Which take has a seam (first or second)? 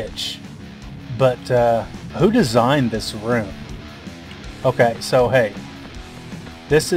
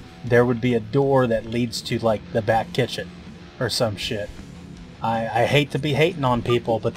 first